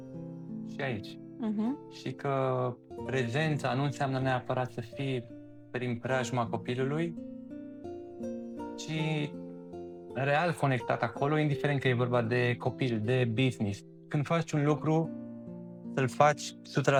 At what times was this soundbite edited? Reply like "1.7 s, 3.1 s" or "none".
none